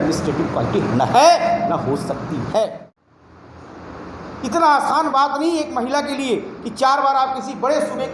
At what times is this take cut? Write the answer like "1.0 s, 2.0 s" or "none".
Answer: 2.9 s